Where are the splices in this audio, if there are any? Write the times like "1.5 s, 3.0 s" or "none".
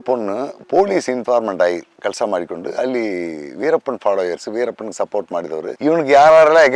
none